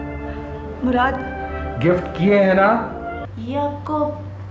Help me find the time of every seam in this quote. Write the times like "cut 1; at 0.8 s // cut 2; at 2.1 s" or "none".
cut 1; at 3.3 s